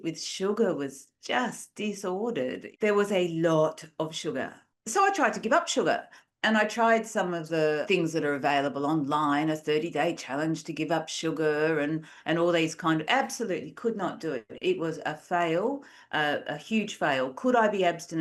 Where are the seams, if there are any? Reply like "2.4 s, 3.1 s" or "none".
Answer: none